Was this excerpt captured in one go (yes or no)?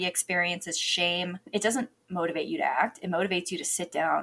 no